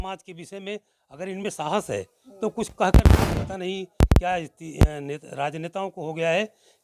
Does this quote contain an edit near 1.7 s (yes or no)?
no